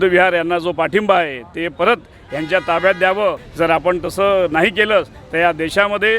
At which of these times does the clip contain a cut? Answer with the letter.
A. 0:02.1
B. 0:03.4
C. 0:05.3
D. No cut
B